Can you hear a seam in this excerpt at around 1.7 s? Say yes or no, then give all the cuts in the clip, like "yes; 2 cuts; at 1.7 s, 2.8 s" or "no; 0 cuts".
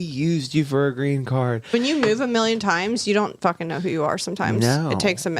yes; 1 cut; at 1.7 s